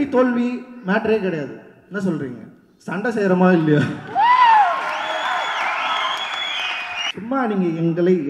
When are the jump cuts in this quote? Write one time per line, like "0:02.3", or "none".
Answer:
0:07.1